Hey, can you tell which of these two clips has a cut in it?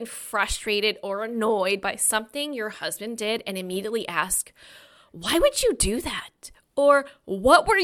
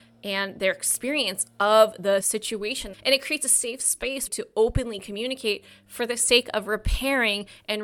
second; 2 cuts; at 2.3 s, 4.3 s

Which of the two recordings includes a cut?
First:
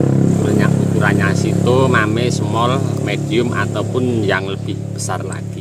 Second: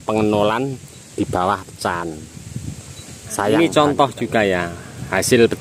second; 1 cut; at 3.5 s

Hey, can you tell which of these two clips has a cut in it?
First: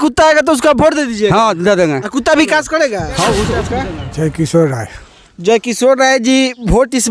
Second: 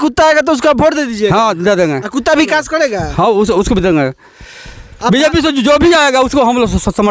first; 1 cut; at 3.7 s

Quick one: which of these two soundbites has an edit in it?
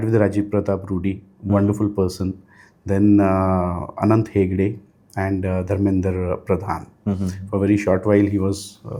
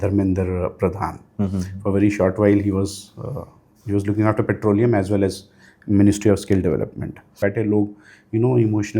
second; 1 cut; at 7.4 s

